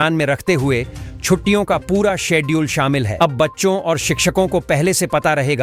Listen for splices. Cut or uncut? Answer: uncut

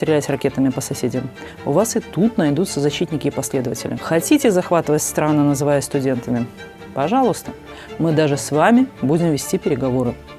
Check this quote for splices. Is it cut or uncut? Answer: cut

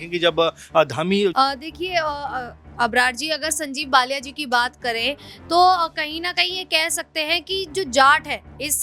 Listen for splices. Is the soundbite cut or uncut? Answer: cut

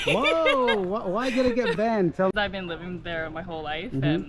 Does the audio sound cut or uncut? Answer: cut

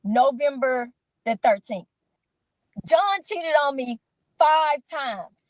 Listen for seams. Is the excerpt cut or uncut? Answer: cut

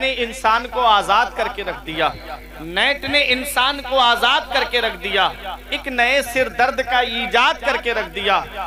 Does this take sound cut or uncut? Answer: uncut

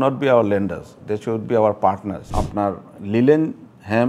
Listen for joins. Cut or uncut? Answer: cut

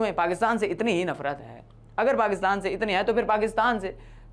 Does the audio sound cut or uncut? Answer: uncut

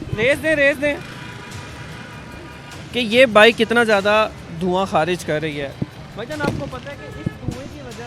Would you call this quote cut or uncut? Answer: uncut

